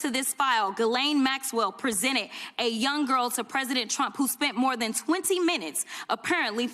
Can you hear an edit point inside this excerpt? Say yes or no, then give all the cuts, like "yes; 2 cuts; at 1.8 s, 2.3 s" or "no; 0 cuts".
no; 0 cuts